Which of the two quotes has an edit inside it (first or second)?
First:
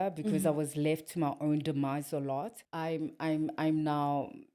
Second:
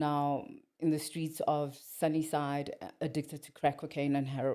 first